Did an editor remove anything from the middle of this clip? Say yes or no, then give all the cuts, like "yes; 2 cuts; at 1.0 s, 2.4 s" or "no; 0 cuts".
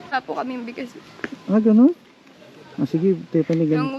no; 0 cuts